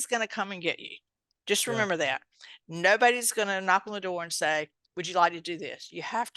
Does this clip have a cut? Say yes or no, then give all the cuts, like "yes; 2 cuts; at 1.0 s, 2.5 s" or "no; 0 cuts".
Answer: no; 0 cuts